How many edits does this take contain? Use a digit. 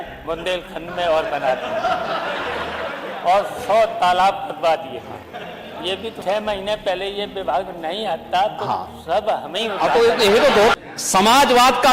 2